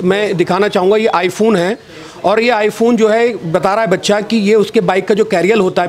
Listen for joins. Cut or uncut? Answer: uncut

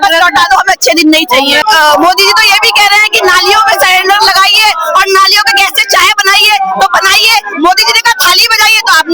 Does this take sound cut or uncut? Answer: cut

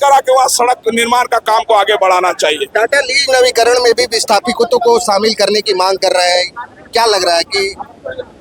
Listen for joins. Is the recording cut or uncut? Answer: uncut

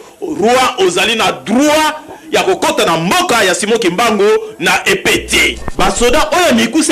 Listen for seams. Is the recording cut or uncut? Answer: cut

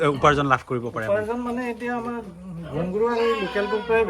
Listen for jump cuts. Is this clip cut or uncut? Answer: uncut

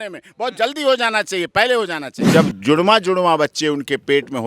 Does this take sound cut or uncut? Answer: cut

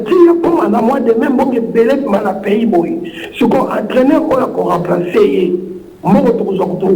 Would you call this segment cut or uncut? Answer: uncut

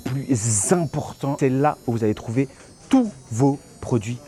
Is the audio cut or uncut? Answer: cut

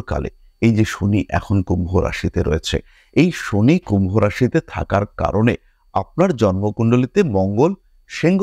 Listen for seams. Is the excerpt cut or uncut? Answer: uncut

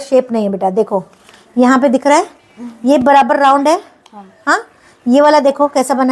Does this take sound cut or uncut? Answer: uncut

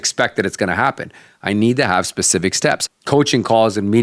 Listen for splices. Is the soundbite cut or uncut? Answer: cut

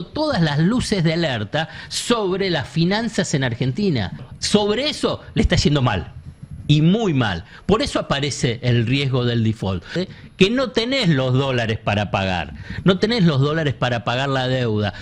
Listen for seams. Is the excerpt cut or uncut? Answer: cut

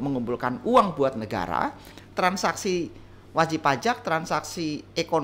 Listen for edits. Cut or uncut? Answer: cut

